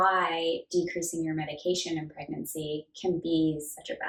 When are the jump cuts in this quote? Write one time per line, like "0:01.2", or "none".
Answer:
none